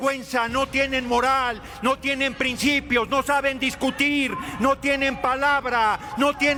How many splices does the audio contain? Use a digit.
0